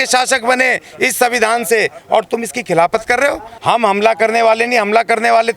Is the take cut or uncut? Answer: cut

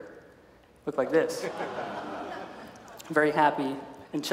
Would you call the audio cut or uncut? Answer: uncut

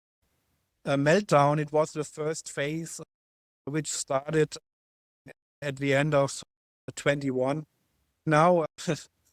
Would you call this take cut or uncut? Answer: cut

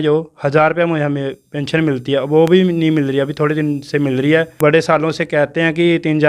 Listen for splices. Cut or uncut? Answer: cut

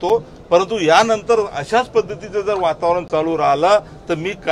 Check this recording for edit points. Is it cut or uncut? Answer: uncut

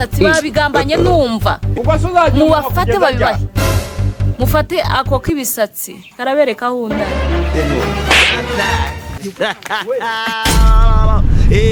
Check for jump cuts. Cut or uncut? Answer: uncut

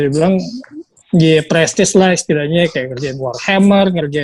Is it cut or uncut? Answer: uncut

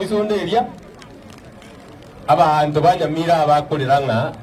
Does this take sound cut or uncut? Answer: uncut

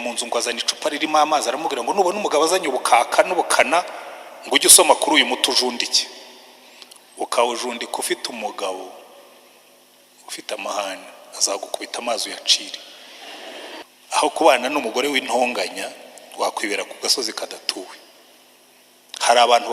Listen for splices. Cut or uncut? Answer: cut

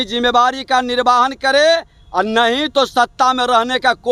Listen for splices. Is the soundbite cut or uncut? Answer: uncut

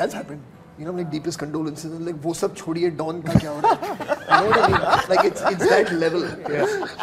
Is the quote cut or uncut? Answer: uncut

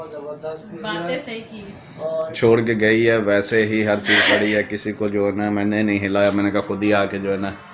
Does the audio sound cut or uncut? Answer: cut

